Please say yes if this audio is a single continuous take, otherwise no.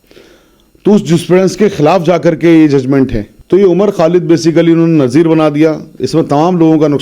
no